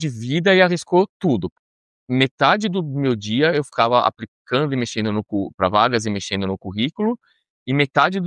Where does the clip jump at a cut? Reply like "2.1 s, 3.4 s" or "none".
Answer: 1.6 s